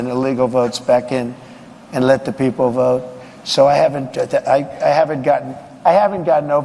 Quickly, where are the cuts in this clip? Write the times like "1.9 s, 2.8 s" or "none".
3.3 s

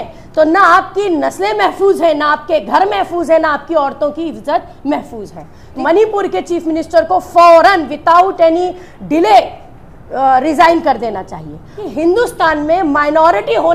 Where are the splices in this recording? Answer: 5.7 s, 11.8 s

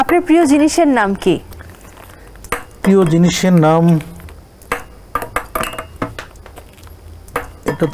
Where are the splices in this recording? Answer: none

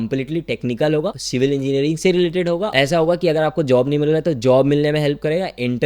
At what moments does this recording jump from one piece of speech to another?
1.2 s, 2.7 s

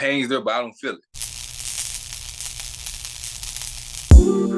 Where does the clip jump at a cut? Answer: 1.1 s

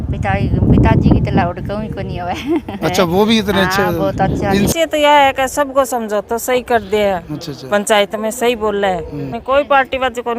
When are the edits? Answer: 4.7 s, 9.4 s

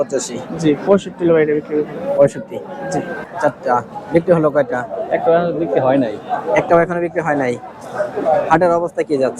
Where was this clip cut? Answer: 3.3 s

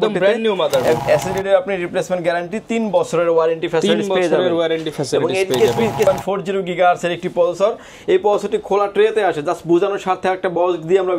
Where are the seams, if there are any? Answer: 1.0 s, 6.1 s

